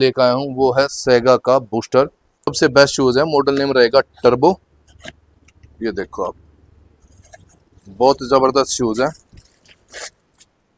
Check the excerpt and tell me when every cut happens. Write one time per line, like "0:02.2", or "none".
0:02.5